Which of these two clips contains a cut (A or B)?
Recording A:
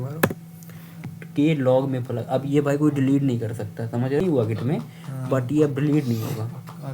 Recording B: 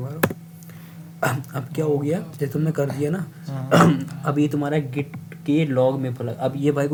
A